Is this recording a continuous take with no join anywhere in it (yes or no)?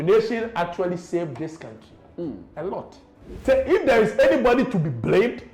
no